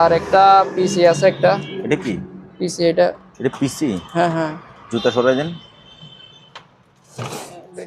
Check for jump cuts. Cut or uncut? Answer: uncut